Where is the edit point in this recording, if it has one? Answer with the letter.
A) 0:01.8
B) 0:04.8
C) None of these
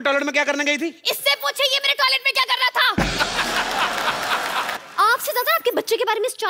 B